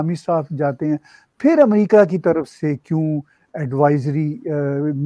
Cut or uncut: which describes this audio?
uncut